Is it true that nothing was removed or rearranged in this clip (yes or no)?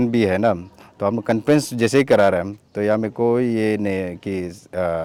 yes